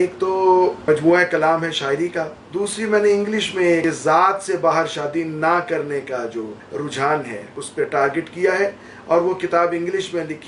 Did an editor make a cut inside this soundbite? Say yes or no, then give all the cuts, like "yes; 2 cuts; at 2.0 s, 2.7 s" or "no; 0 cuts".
yes; 5 cuts; at 0.8 s, 2.4 s, 3.8 s, 6.6 s, 7.6 s